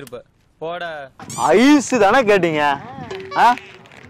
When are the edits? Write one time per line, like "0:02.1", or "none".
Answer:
0:01.2